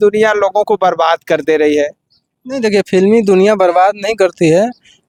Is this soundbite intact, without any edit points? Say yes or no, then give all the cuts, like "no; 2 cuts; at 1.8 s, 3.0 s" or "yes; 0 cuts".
yes; 0 cuts